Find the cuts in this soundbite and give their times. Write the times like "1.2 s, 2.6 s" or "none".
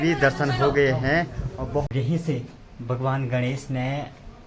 1.9 s